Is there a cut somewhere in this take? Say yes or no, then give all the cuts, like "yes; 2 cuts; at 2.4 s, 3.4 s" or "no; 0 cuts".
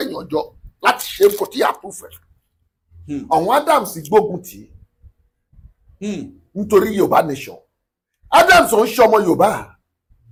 no; 0 cuts